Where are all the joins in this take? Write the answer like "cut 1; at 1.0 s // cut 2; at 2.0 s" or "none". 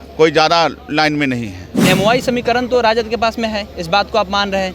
cut 1; at 1.8 s